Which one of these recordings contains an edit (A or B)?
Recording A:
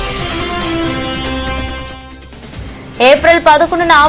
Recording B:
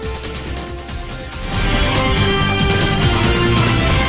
A